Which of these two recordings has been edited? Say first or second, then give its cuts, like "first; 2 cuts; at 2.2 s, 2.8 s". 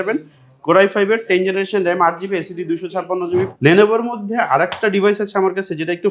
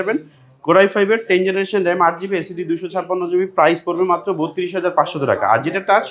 first; 1 cut; at 3.5 s